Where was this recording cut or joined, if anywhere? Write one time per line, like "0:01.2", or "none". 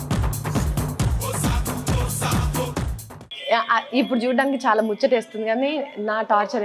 0:03.1